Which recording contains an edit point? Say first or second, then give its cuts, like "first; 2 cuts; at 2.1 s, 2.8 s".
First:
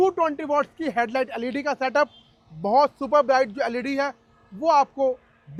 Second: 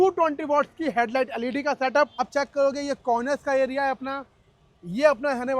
second; 1 cut; at 2.2 s